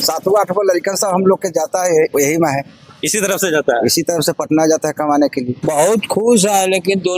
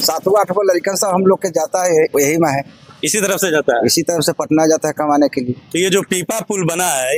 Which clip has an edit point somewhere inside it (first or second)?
first